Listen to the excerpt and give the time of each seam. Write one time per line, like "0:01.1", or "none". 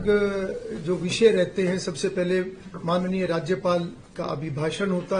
none